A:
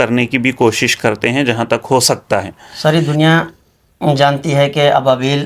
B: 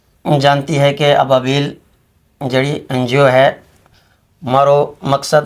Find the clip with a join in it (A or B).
A